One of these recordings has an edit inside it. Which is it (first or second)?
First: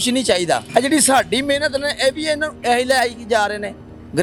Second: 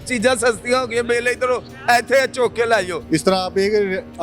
second